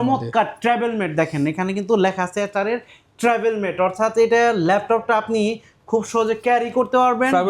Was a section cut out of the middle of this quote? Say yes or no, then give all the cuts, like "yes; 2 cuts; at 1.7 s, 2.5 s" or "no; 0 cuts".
no; 0 cuts